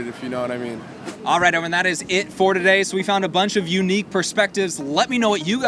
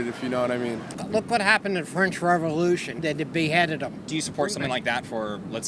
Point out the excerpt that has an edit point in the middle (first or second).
second